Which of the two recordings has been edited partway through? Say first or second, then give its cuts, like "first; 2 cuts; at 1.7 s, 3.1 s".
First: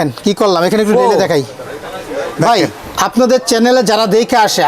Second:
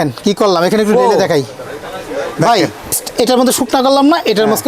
second; 1 cut; at 3.0 s